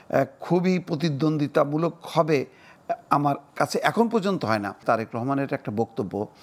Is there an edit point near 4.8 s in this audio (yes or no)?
yes